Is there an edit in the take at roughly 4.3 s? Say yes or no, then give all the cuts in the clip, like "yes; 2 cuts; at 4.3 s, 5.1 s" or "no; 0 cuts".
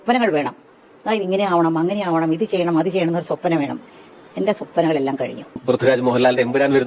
no; 1 cut; at 5.5 s